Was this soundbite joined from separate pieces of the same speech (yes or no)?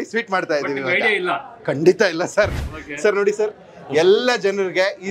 yes